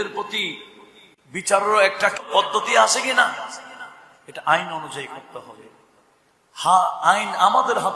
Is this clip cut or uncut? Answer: cut